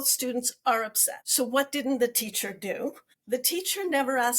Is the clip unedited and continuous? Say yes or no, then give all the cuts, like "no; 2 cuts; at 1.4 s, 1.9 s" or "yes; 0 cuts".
no; 1 cut; at 3.1 s